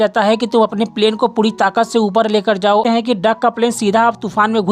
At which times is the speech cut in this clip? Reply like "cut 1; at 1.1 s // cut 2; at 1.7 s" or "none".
cut 1; at 2.8 s